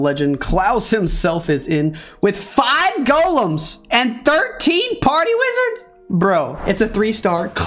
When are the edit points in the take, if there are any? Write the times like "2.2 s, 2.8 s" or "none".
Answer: 6.6 s